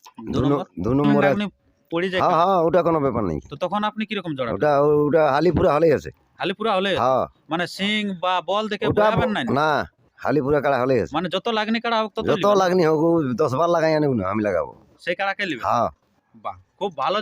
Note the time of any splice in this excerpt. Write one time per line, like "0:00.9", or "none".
0:01.4